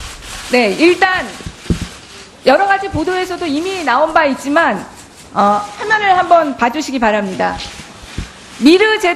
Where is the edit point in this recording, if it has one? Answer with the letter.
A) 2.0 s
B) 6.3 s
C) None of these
B